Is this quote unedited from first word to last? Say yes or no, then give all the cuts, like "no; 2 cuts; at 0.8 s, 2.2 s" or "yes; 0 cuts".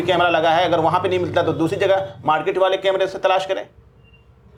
yes; 0 cuts